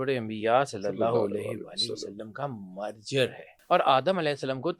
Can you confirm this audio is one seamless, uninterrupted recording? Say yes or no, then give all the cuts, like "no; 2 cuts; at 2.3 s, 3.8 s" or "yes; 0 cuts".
no; 1 cut; at 3.5 s